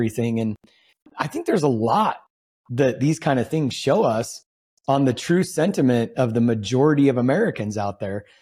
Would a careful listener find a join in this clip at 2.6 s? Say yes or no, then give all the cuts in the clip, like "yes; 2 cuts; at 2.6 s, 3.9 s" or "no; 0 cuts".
no; 1 cut; at 1.1 s